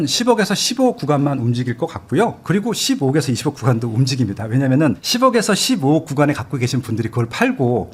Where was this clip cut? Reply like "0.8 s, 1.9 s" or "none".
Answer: none